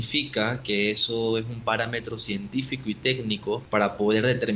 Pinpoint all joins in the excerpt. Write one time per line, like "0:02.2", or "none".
0:03.6

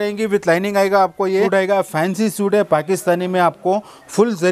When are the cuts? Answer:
0:01.5

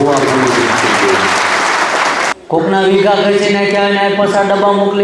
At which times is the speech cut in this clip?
0:02.3

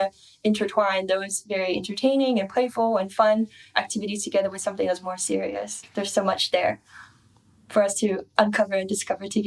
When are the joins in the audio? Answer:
0:05.8

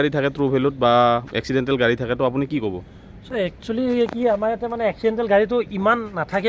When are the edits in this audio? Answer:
none

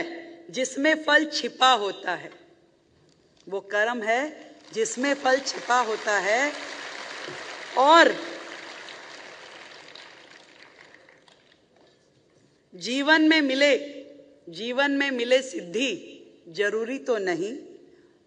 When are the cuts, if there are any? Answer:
none

